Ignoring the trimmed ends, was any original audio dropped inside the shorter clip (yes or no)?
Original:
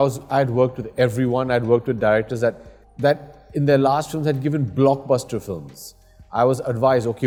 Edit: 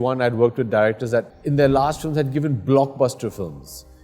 yes